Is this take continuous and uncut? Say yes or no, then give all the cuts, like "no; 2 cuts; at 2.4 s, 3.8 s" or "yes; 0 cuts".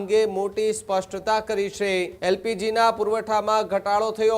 no; 1 cut; at 2.1 s